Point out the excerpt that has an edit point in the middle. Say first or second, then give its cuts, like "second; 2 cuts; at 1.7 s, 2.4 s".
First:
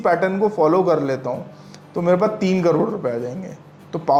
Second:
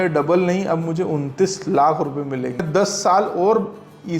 second; 1 cut; at 2.7 s